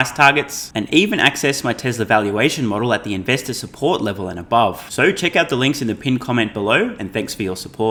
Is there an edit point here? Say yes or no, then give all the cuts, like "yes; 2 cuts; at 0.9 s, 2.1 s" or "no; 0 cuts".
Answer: no; 0 cuts